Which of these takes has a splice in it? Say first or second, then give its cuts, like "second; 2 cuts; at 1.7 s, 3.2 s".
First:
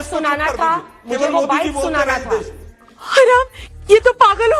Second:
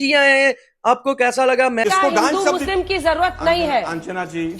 second; 1 cut; at 1.8 s